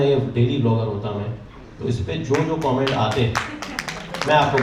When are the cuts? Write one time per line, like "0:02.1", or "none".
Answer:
none